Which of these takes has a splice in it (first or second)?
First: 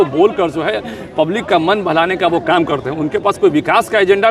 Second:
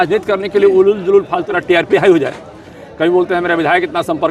second